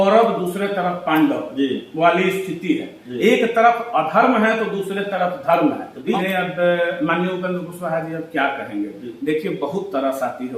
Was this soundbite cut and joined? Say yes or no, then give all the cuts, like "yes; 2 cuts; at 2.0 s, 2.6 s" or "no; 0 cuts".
yes; 1 cut; at 6.1 s